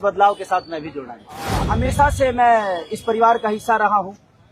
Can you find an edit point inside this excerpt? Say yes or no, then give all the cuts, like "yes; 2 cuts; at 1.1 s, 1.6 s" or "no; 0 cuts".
yes; 1 cut; at 1.7 s